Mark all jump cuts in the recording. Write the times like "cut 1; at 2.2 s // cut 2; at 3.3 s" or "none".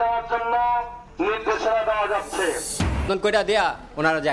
cut 1; at 3.1 s